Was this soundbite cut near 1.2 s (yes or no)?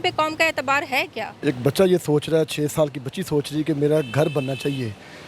yes